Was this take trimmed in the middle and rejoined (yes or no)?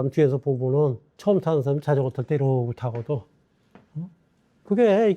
yes